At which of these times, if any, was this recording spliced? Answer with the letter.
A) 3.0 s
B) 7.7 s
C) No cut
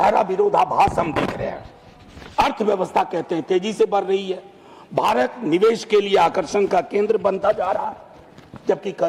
C